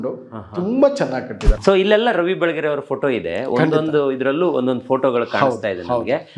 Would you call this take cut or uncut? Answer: cut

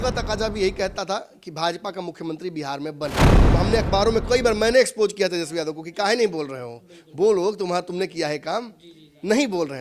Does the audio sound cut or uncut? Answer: cut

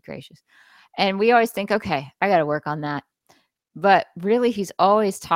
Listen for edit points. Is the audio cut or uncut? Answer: uncut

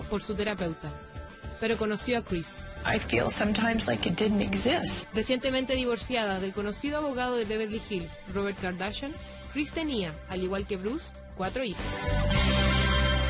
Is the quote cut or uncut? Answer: cut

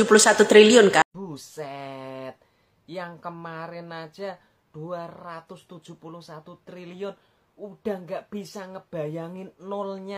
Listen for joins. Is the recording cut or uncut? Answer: cut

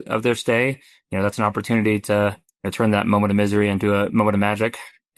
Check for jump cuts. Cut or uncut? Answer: uncut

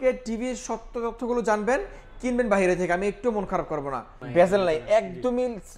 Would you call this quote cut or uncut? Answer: cut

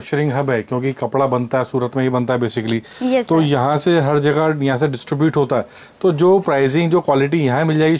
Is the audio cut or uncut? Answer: uncut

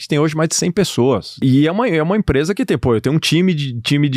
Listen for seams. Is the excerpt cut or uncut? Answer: cut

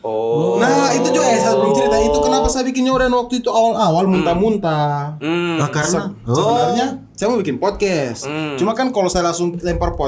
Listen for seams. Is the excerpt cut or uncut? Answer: uncut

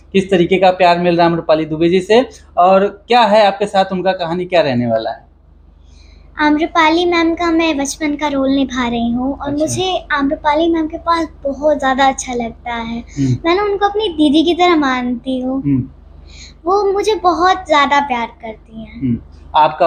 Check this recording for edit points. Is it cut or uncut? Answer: uncut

